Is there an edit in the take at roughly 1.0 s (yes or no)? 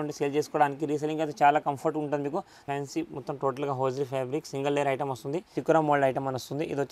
no